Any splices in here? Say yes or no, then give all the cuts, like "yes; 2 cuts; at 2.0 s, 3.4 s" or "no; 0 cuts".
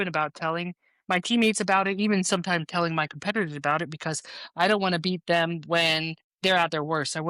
no; 0 cuts